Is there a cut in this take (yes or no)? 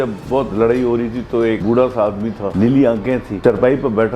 yes